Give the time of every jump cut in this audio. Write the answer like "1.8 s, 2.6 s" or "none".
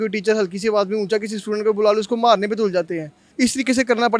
3.2 s